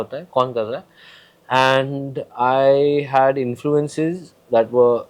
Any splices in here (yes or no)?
no